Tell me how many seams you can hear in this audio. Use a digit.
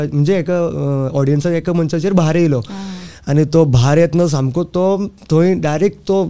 0